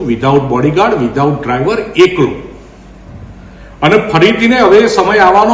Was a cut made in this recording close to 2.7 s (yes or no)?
no